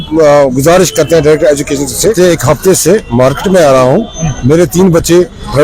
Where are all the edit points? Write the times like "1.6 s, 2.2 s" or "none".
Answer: 2.1 s